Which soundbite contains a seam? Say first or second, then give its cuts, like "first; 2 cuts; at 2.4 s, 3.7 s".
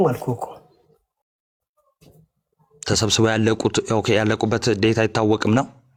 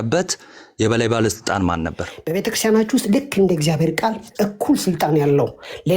second; 1 cut; at 2.1 s